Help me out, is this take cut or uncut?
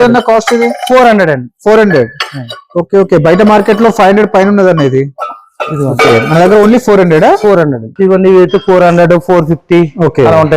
cut